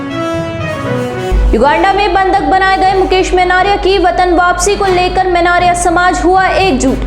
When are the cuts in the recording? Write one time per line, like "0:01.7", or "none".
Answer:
0:01.0